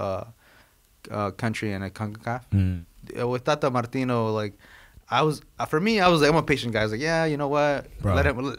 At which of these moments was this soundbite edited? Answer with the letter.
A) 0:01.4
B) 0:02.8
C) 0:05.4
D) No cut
B